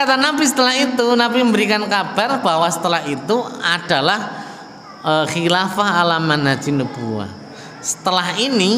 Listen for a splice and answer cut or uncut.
uncut